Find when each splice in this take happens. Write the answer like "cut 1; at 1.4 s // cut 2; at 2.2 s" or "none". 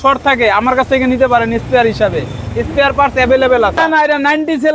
cut 1; at 3.8 s